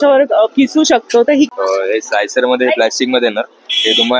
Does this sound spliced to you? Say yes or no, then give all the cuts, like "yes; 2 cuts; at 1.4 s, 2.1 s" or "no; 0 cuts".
yes; 1 cut; at 1.5 s